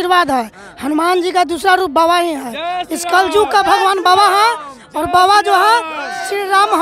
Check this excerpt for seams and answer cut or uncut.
uncut